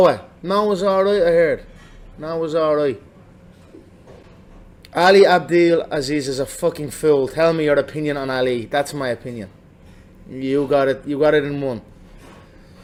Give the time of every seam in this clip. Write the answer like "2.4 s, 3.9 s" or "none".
none